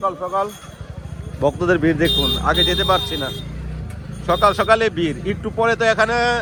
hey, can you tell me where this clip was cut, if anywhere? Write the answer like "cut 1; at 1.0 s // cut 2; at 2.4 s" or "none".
none